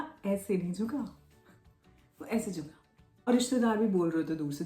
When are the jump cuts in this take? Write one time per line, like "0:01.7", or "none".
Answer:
0:03.3